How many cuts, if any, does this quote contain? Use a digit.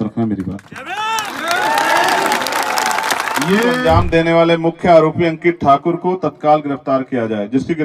1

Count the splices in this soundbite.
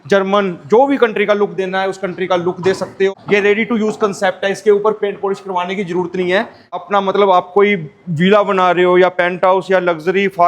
2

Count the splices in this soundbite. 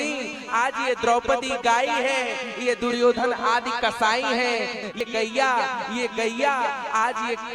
1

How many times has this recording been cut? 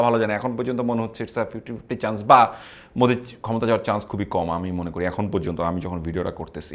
0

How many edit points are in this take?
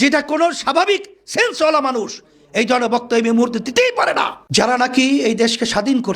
1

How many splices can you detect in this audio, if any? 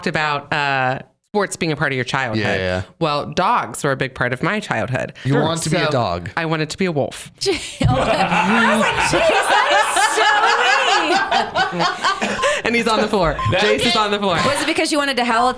1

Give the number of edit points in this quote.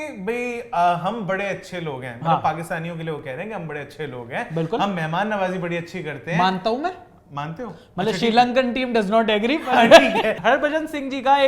1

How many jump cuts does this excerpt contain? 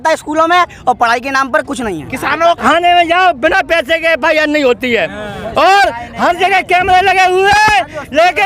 1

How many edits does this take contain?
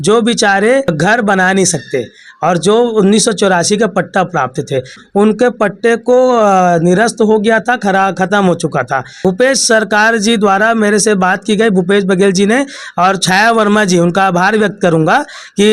3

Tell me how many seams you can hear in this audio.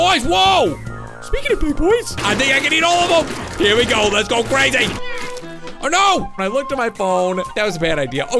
4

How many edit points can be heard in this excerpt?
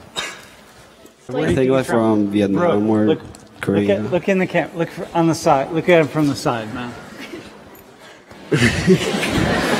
1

